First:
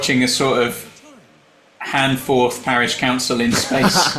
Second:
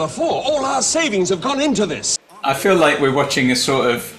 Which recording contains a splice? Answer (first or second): second